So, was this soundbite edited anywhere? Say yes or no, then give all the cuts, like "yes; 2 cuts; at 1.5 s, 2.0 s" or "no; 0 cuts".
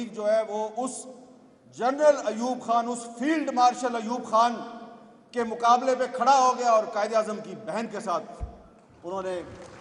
no; 0 cuts